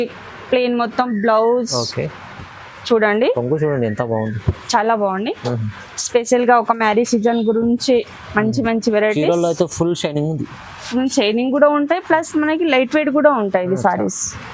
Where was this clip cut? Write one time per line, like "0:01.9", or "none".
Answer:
none